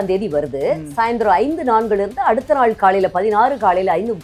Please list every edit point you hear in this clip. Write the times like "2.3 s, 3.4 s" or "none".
none

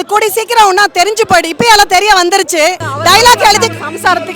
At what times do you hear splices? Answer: 2.9 s

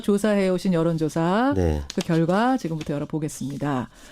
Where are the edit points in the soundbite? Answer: 2.1 s

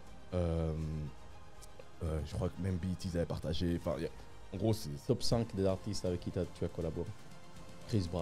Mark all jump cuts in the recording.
5.0 s

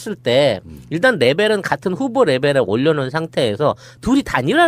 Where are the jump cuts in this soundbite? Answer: 2.5 s

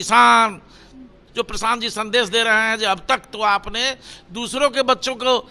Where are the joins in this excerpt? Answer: 1.2 s

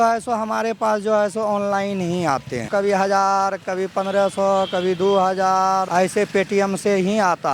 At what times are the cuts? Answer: 2.7 s, 5.9 s

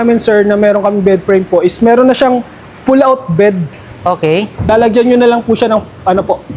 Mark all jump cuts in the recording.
4.7 s

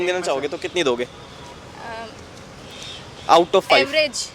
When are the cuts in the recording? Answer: none

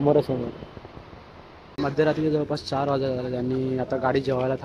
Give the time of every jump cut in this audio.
1.8 s

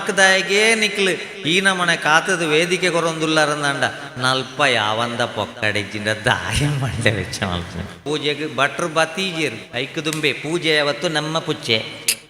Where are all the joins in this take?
8.0 s

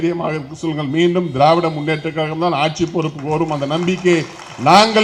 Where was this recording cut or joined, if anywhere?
none

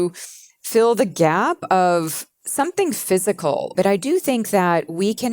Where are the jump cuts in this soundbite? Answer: 3.7 s

